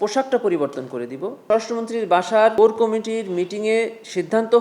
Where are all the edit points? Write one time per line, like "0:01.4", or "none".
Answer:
0:01.4
0:02.5